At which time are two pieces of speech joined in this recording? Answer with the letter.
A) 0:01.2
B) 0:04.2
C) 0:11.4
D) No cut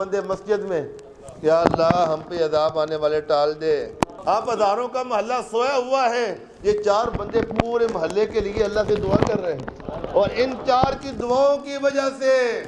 B